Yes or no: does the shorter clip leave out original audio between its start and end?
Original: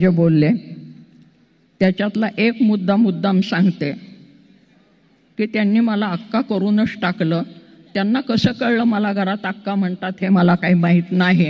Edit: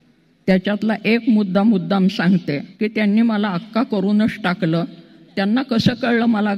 yes